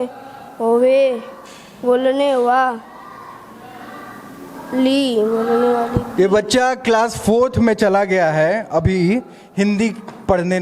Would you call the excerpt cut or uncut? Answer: uncut